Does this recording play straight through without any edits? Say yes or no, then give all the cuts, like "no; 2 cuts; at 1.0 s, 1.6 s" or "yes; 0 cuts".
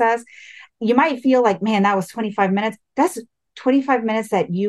yes; 0 cuts